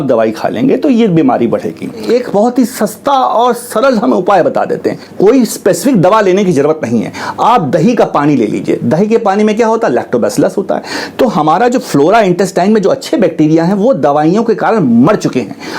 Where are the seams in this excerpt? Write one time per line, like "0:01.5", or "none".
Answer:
0:02.0
0:05.0